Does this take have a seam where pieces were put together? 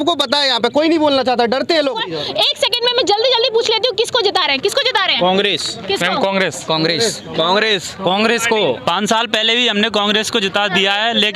yes; 1 cut; at 2.1 s

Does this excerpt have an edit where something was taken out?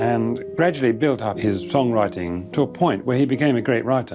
yes; 2 cuts; at 1.3 s, 2.4 s

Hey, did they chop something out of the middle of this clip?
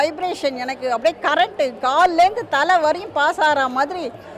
no; 0 cuts

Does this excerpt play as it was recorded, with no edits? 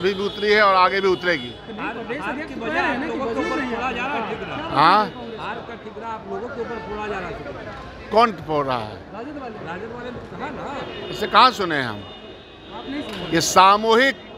yes; 0 cuts

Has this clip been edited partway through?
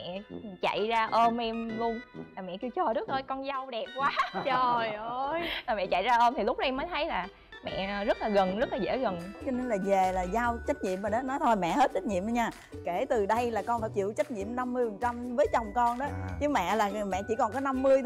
yes; 1 cut; at 9.3 s

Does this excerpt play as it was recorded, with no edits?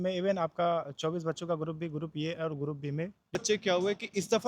no; 1 cut; at 3.3 s

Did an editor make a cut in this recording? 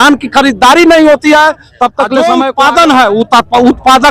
yes; 1 cut; at 2.2 s

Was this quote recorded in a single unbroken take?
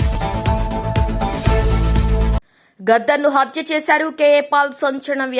no; 1 cut; at 2.5 s

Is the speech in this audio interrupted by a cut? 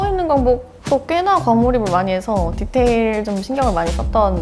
no; 0 cuts

